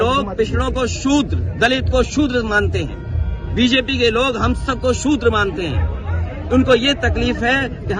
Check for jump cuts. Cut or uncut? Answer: uncut